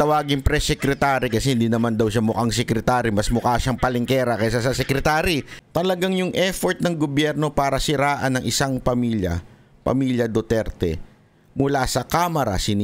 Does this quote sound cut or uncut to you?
cut